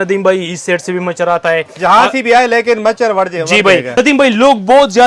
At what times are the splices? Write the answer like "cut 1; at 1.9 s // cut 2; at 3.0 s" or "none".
cut 1; at 3.9 s